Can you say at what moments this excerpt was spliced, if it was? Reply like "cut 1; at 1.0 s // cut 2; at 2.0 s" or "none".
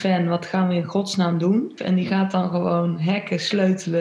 cut 1; at 1.8 s